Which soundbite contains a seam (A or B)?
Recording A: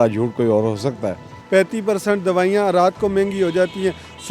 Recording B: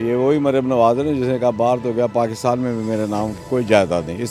A